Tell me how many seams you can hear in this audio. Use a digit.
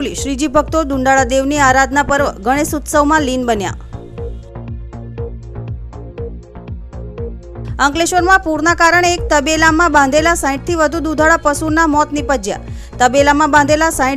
3